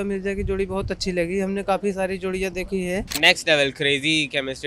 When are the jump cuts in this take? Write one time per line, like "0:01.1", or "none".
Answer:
0:03.1